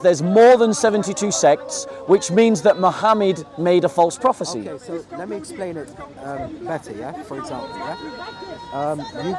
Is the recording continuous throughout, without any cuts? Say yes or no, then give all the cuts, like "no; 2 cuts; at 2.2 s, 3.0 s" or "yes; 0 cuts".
yes; 0 cuts